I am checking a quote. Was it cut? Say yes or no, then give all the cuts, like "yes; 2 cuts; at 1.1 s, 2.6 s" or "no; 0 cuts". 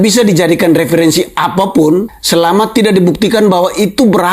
yes; 1 cut; at 2.2 s